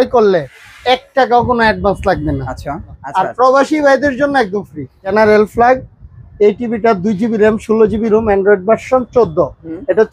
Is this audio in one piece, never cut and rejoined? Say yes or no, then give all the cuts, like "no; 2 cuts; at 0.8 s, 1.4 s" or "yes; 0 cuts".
no; 2 cuts; at 3.0 s, 5.1 s